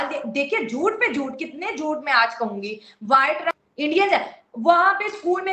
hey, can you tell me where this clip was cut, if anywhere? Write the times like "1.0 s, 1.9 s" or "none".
3.5 s